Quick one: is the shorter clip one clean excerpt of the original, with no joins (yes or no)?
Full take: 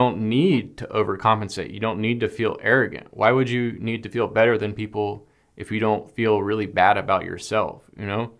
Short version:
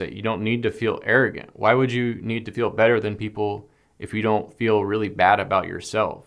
yes